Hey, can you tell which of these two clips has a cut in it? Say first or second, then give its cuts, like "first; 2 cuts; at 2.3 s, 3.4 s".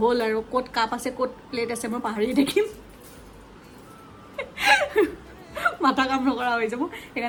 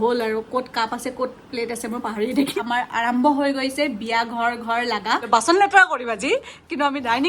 second; 2 cuts; at 2.6 s, 5.2 s